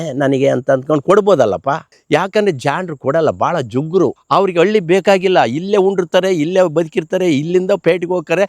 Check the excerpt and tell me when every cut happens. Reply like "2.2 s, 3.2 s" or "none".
1.9 s, 4.2 s